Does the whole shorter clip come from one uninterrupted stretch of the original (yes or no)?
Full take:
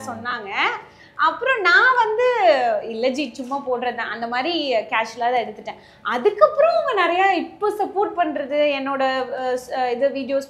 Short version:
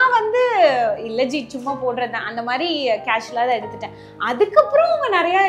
yes